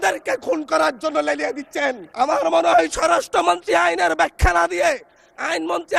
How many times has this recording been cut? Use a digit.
1